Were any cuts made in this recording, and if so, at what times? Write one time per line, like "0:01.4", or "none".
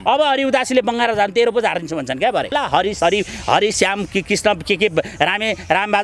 0:02.5